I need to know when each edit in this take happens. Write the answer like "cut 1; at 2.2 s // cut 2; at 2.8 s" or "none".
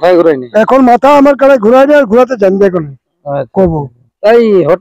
none